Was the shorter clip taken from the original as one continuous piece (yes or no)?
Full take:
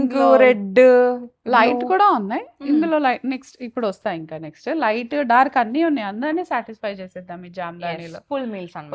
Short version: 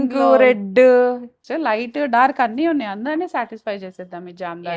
no